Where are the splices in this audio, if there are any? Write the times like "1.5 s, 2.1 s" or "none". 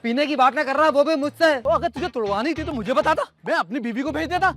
1.6 s